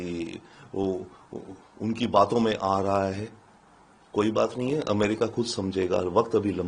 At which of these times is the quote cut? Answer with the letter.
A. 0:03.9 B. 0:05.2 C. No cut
C